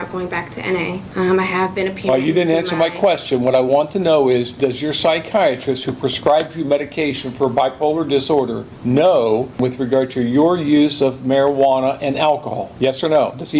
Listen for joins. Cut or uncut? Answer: cut